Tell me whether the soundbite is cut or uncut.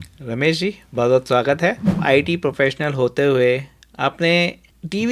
cut